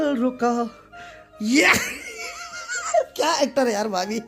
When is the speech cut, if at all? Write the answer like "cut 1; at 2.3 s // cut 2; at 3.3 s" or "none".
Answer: none